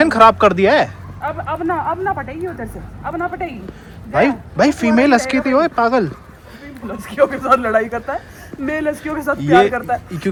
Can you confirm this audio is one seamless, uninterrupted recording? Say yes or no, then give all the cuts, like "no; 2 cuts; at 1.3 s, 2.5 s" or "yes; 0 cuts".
yes; 0 cuts